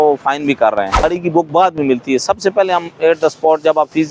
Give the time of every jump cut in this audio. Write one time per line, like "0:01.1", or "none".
0:01.0